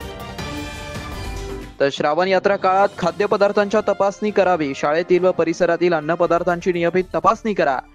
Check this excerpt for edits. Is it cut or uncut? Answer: cut